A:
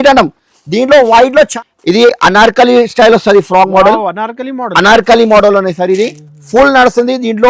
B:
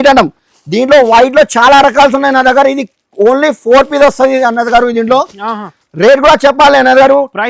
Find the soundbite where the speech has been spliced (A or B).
A